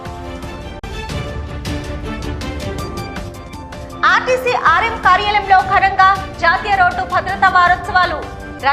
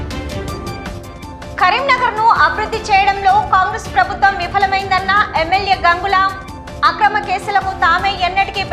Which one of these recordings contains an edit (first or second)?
second